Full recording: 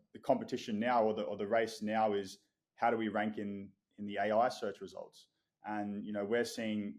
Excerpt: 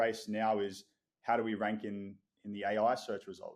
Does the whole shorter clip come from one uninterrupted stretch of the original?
yes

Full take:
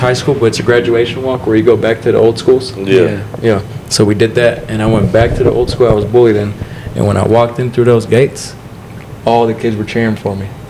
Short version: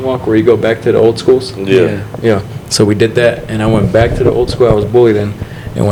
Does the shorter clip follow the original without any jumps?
yes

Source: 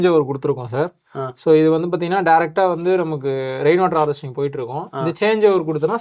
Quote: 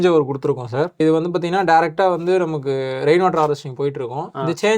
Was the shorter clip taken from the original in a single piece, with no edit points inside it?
no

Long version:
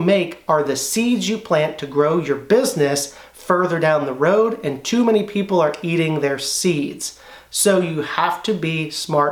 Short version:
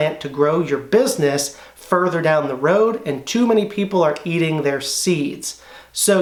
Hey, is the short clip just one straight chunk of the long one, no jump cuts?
yes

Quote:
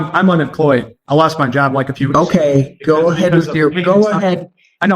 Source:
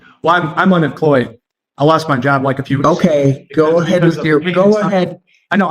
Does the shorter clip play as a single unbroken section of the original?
no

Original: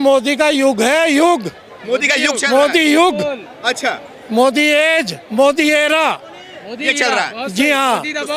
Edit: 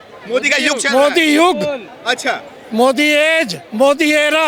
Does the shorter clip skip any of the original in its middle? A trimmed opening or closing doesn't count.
no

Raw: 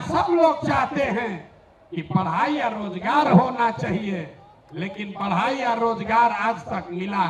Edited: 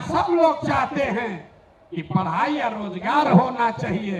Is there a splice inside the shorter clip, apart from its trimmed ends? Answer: no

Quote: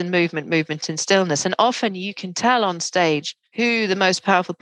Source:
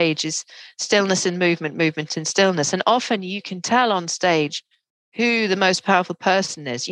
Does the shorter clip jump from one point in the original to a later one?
yes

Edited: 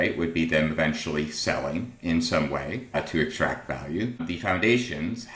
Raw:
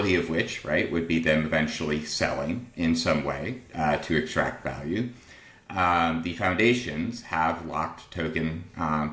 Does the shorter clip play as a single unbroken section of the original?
no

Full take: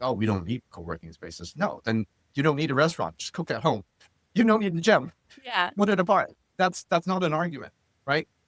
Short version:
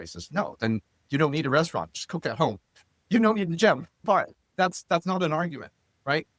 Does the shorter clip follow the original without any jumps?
no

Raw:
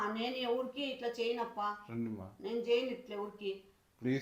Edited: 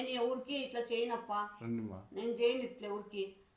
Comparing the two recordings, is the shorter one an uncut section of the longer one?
yes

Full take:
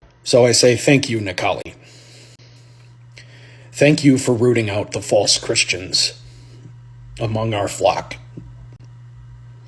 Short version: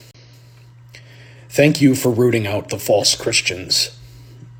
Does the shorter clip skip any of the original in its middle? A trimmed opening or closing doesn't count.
no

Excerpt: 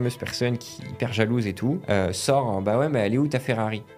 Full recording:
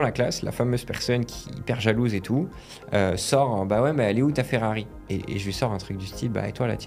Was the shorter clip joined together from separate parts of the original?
yes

